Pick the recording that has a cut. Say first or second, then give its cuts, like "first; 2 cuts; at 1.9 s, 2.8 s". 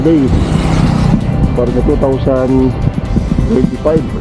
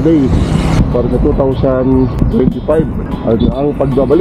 second; 3 cuts; at 0.8 s, 2.1 s, 3.0 s